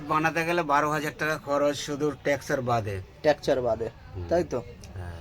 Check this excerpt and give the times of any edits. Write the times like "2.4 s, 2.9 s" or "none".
none